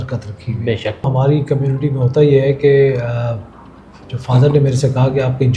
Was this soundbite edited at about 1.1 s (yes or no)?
yes